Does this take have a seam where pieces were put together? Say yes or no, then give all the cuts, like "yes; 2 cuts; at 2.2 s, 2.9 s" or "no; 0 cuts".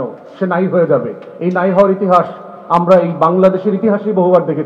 no; 0 cuts